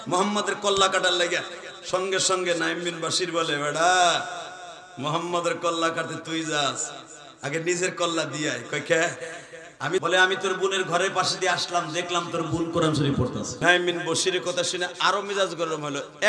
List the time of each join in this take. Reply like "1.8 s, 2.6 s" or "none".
10.0 s, 13.5 s